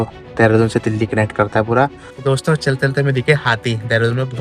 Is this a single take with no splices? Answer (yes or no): no